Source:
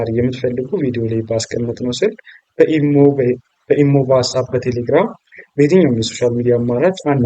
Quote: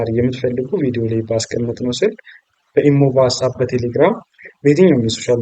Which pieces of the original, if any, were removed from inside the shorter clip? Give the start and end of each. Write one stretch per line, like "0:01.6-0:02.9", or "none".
0:02.5-0:03.4